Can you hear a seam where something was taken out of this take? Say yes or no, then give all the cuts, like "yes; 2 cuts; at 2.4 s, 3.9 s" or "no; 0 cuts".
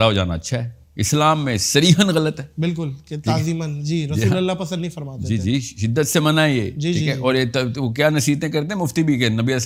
no; 0 cuts